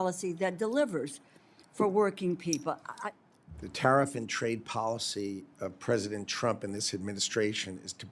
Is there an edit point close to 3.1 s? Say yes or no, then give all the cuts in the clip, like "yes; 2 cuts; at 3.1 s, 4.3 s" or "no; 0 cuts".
yes; 1 cut; at 3.1 s